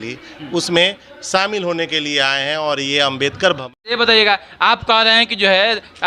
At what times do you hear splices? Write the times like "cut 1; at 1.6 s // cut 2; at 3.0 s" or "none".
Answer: cut 1; at 3.6 s

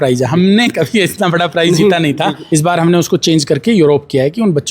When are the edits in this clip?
cut 1; at 2.4 s

